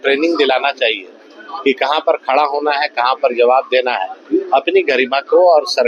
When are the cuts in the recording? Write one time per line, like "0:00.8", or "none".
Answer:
none

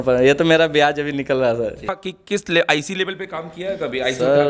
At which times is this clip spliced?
0:02.0

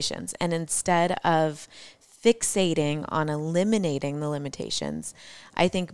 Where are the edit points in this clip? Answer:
none

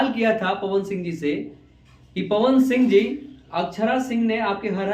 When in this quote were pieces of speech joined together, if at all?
none

